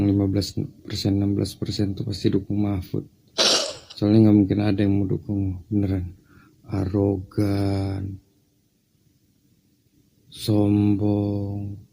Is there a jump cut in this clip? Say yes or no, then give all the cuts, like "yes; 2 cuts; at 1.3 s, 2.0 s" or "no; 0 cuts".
no; 0 cuts